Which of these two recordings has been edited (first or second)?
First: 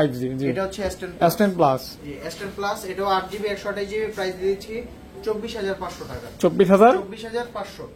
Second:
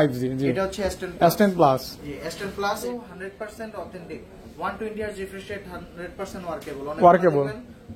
second